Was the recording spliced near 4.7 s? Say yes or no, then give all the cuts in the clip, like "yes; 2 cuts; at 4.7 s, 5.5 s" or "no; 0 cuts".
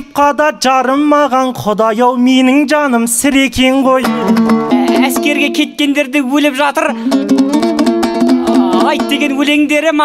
yes; 1 cut; at 4.7 s